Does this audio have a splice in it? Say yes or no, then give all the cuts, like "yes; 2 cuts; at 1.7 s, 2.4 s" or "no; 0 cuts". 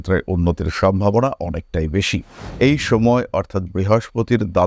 yes; 1 cut; at 2.4 s